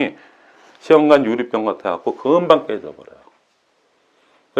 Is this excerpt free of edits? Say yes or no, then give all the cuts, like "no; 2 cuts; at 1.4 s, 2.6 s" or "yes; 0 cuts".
yes; 0 cuts